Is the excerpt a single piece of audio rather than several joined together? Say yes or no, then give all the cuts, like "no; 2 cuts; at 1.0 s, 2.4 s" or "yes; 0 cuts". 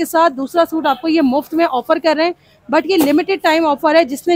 yes; 0 cuts